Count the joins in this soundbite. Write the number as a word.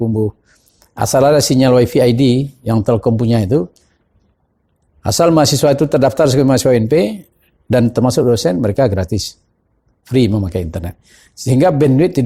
zero